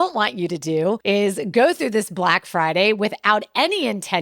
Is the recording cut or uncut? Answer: cut